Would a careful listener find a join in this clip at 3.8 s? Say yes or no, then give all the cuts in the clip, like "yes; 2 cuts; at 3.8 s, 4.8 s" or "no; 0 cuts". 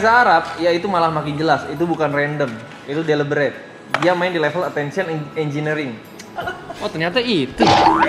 no; 1 cut; at 6.4 s